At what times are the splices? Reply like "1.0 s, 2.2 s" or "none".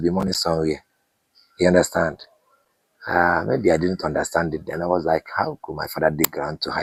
none